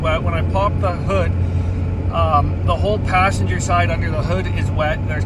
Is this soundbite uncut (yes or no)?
yes